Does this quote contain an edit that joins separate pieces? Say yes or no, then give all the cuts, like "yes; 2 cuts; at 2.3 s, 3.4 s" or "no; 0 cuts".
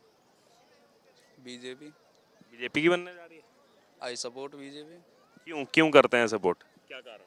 no; 0 cuts